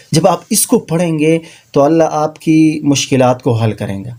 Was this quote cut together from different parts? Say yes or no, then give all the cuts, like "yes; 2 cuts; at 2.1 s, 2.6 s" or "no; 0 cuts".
no; 0 cuts